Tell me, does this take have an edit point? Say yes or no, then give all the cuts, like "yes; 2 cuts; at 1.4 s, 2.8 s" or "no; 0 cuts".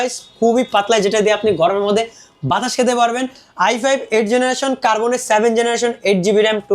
no; 0 cuts